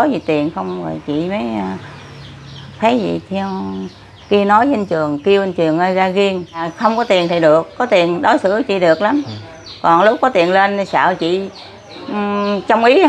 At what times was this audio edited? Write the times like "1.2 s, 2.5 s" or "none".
6.7 s